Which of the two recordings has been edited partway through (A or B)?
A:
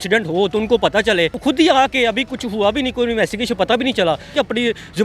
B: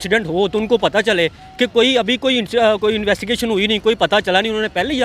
A